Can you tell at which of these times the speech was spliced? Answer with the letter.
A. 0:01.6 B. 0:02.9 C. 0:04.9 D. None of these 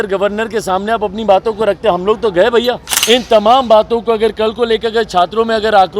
B